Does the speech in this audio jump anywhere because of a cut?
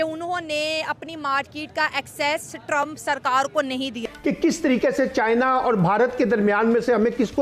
yes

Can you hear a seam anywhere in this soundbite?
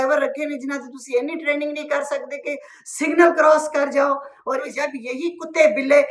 yes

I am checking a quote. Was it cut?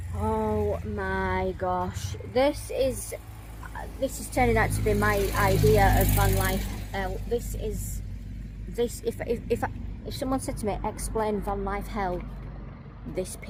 no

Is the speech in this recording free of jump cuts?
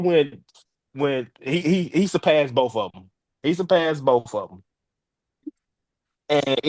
yes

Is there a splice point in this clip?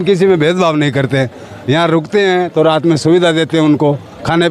no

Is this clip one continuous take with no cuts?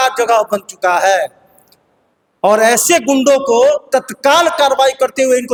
yes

